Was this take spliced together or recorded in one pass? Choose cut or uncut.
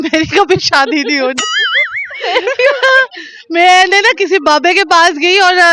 uncut